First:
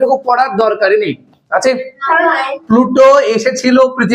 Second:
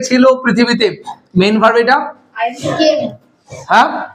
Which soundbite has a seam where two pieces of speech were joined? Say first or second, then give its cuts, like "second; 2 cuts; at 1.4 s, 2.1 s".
first; 1 cut; at 2.5 s